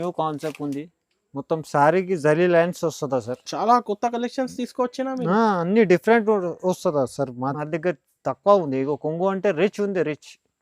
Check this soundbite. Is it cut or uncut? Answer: cut